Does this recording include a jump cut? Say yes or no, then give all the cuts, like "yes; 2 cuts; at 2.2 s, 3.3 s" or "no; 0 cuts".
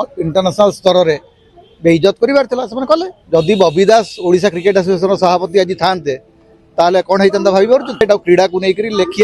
yes; 2 cuts; at 3.1 s, 8.0 s